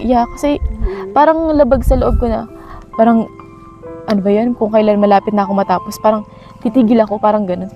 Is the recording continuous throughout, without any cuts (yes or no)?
yes